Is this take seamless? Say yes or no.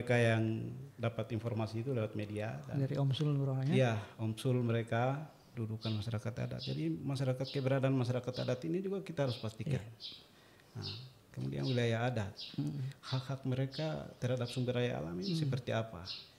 no